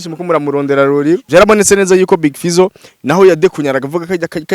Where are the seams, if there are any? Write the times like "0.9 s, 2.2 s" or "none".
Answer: 1.2 s